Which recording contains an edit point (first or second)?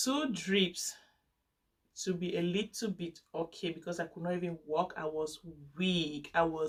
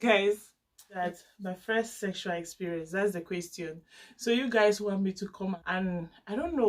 second